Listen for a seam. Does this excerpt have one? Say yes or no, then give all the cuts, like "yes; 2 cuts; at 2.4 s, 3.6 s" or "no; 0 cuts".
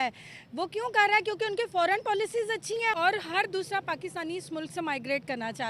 yes; 1 cut; at 3.0 s